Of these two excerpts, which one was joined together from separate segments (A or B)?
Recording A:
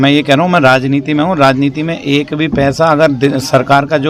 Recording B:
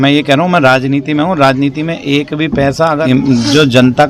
B